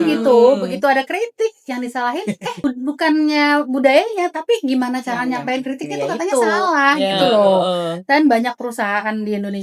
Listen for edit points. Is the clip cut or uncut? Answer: uncut